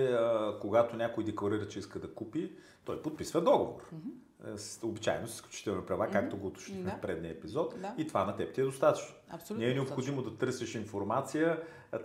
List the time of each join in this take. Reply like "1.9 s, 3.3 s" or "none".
none